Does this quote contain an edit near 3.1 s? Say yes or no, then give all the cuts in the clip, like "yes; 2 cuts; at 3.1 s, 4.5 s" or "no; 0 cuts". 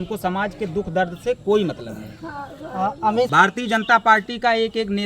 yes; 1 cut; at 3.1 s